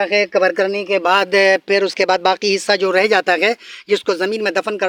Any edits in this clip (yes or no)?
no